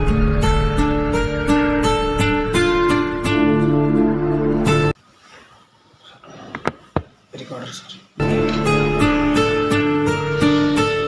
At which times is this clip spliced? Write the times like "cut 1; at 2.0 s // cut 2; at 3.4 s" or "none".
none